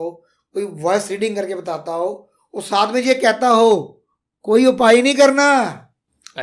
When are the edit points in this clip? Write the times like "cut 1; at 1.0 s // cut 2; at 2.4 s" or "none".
none